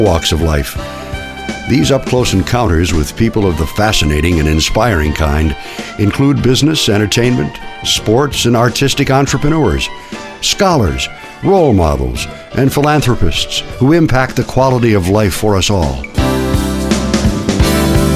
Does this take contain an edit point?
yes; 1 cut; at 16.1 s

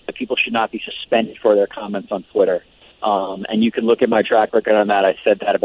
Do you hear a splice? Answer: no; 0 cuts

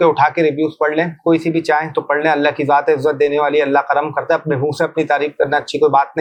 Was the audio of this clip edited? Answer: no; 0 cuts

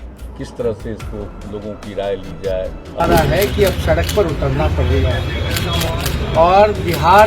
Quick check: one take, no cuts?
no; 1 cut; at 3.1 s

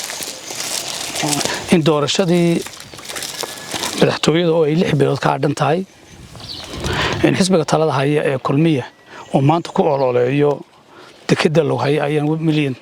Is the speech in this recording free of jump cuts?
yes; 0 cuts

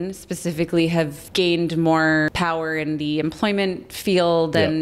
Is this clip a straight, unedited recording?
no; 2 cuts; at 1.2 s, 2.3 s

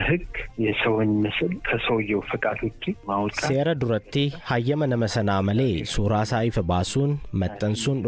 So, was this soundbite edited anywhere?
yes; 1 cut; at 3.5 s

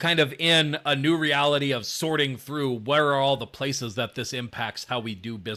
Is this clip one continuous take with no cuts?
yes; 0 cuts

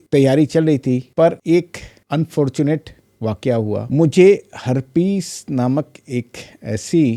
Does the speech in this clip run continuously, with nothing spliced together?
yes; 0 cuts

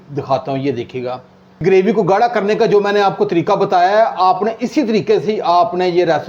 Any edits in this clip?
yes; 1 cut; at 1.6 s

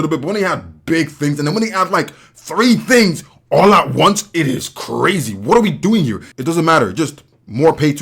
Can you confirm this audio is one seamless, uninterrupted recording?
no; 1 cut; at 6.2 s

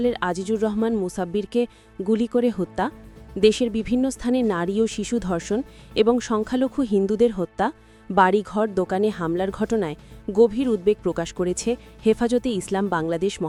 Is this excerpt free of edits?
yes; 0 cuts

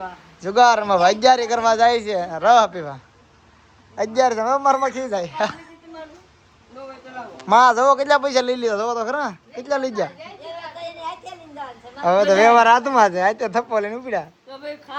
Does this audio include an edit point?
no; 0 cuts

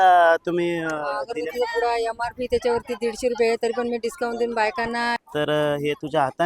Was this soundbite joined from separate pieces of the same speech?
yes; 1 cut; at 5.2 s

